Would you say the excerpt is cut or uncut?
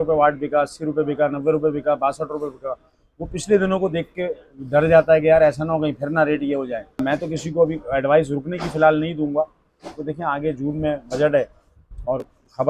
cut